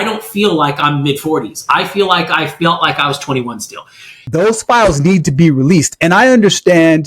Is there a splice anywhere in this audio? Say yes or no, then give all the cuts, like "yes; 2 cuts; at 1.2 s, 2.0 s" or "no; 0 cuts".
yes; 1 cut; at 4.1 s